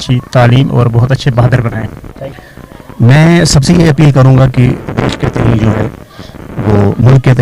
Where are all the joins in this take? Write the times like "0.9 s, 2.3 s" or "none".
2.3 s